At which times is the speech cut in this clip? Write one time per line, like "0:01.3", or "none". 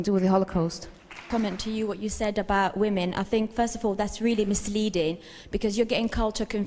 0:01.2